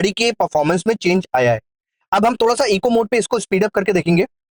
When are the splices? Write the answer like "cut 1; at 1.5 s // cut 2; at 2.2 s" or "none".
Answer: none

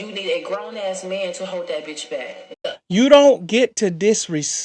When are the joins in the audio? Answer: cut 1; at 2.6 s

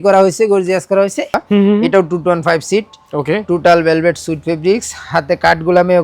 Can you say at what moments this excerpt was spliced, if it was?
cut 1; at 1.4 s

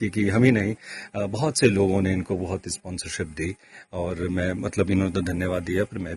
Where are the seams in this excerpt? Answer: none

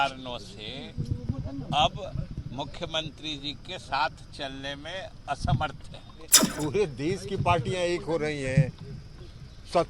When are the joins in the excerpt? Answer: cut 1; at 6.4 s

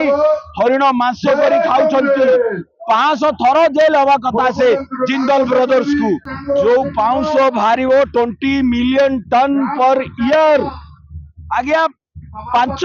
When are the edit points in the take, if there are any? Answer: cut 1; at 6.3 s

